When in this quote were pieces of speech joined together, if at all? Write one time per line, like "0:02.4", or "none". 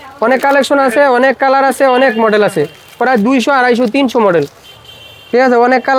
none